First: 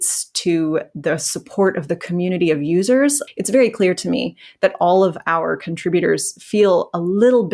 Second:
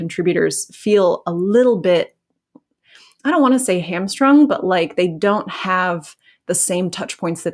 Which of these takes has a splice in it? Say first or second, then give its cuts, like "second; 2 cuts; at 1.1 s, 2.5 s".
first; 1 cut; at 3.2 s